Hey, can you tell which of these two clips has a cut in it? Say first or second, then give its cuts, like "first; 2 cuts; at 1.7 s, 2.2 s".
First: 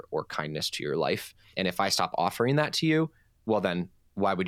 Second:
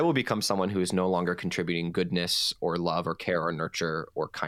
first; 2 cuts; at 1.4 s, 3.3 s